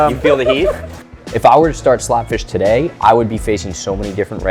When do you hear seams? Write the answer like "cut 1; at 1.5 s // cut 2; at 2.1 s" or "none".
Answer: cut 1; at 0.9 s